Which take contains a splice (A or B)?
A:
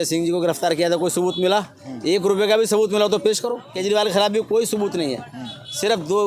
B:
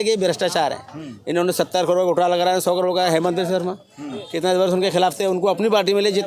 A